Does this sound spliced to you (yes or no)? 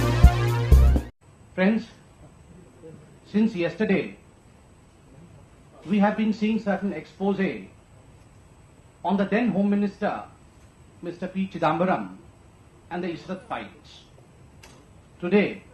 no